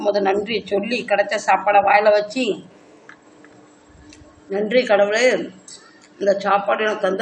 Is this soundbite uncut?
yes; 0 cuts

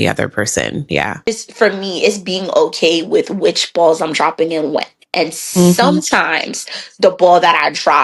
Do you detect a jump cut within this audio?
yes; 1 cut; at 1.3 s

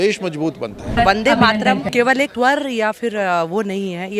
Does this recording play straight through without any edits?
no; 2 cuts; at 0.9 s, 2.2 s

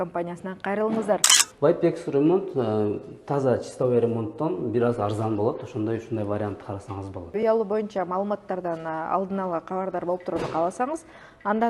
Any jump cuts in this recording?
yes; 2 cuts; at 1.3 s, 7.4 s

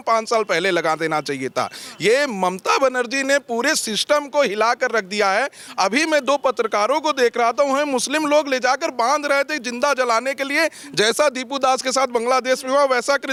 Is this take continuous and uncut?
yes; 0 cuts

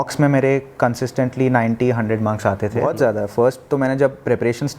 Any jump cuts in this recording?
yes; 1 cut; at 2.8 s

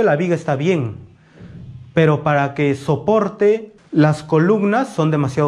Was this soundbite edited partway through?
yes; 1 cut; at 3.8 s

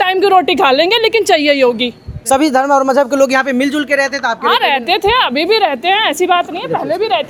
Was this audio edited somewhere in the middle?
no; 0 cuts

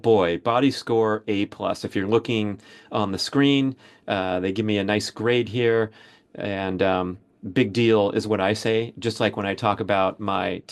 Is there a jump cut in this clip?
no; 0 cuts

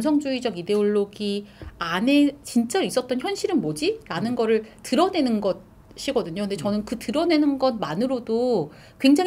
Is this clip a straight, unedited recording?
yes; 0 cuts

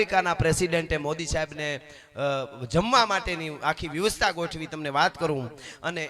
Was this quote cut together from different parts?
no; 0 cuts

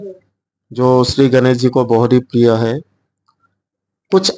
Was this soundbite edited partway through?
no; 0 cuts

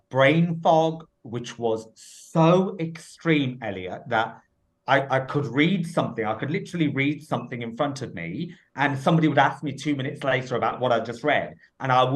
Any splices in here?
no; 0 cuts

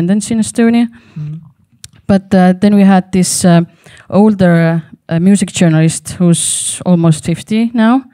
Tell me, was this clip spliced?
no; 0 cuts

